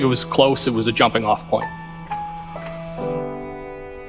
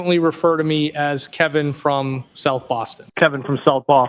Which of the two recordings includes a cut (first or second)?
second